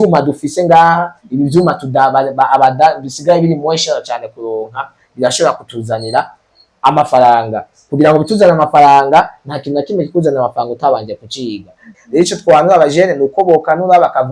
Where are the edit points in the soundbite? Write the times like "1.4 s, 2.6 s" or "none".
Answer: 11.8 s